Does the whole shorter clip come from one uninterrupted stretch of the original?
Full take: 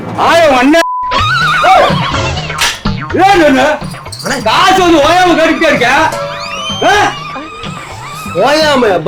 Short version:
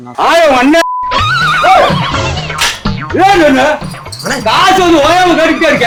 yes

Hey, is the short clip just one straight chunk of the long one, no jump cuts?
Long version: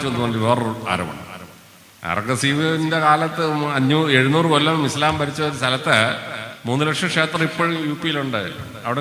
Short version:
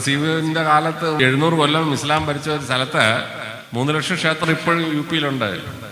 no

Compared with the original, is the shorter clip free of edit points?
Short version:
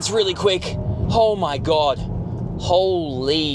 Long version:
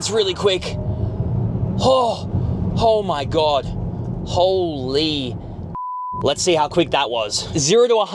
no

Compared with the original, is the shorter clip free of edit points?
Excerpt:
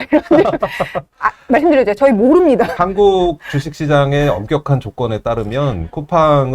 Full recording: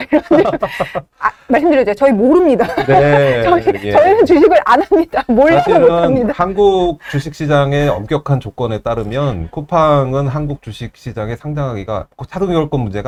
no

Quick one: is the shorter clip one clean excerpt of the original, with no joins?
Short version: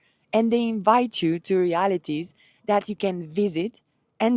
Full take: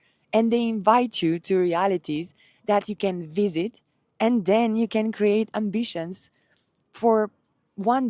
yes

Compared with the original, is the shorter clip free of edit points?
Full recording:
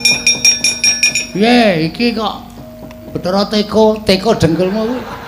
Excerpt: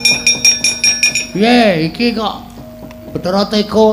yes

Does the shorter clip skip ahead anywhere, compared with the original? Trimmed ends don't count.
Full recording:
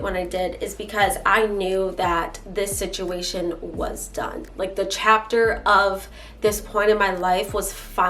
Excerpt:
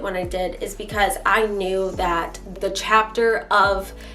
yes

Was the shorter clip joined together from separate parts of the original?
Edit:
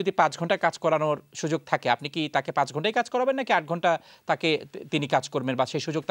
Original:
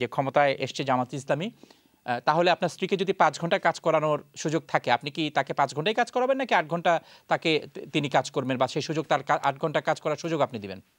no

